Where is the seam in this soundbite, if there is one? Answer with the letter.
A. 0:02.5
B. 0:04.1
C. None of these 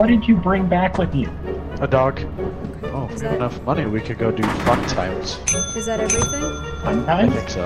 A